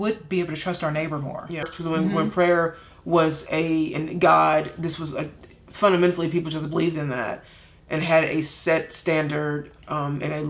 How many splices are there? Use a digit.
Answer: 1